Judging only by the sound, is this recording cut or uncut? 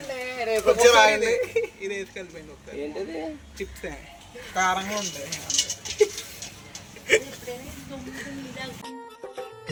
uncut